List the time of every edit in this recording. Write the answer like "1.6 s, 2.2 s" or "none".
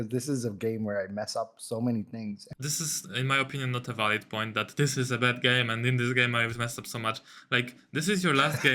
2.4 s